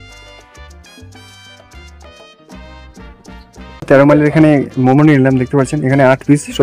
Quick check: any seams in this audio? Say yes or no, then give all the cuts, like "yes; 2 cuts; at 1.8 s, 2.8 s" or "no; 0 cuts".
yes; 1 cut; at 3.9 s